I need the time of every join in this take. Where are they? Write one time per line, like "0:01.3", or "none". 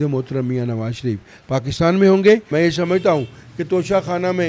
0:02.5